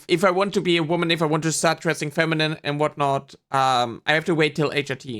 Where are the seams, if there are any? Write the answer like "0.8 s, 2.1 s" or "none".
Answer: none